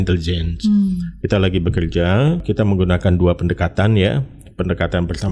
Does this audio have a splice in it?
yes; 1 cut; at 2.4 s

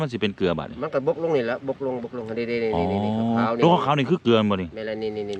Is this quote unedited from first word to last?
yes; 0 cuts

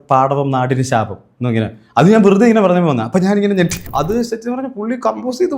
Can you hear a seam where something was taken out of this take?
yes; 1 cut; at 3.8 s

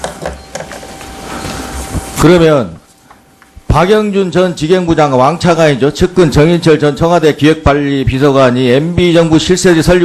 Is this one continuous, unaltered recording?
yes; 0 cuts

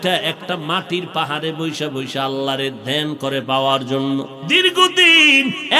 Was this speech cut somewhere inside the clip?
yes; 1 cut; at 4.4 s

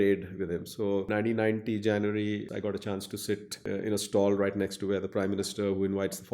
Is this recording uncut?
no; 3 cuts; at 1.1 s, 2.5 s, 3.6 s

